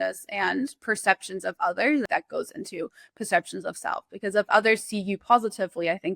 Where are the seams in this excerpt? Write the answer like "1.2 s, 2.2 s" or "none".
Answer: 2.1 s